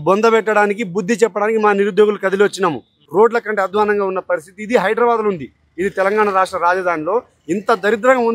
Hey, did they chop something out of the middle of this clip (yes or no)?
yes